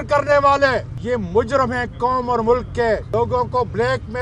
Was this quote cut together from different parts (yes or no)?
yes